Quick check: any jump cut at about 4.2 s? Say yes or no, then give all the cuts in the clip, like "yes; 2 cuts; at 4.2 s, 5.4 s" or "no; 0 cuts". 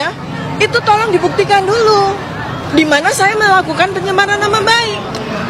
no; 0 cuts